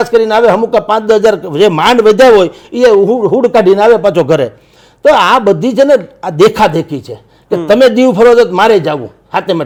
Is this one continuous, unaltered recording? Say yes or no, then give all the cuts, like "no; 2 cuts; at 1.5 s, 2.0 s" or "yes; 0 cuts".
yes; 0 cuts